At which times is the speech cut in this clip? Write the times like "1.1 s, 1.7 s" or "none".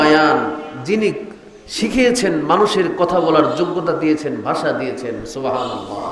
none